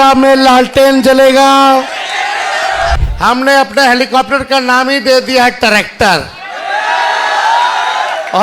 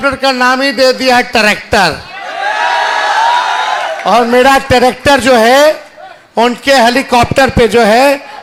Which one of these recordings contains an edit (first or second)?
first